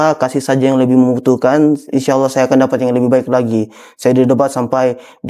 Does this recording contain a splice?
no; 0 cuts

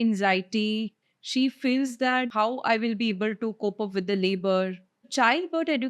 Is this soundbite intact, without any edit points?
no; 3 cuts; at 1.0 s, 2.3 s, 5.1 s

